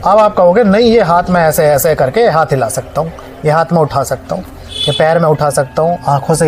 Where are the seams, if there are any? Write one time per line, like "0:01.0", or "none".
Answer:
none